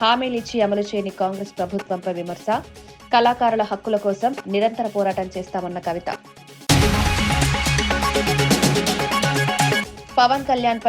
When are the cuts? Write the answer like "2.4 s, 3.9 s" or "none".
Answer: 6.6 s, 9.9 s